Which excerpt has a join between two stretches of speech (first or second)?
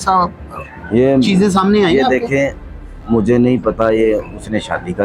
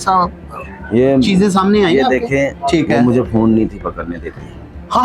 second